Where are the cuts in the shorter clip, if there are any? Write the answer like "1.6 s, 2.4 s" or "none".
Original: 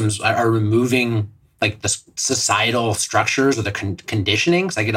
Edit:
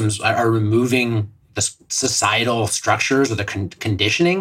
1.5 s